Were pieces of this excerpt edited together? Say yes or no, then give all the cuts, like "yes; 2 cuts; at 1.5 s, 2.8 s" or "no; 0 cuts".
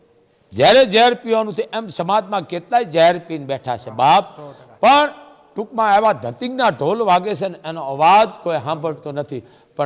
no; 0 cuts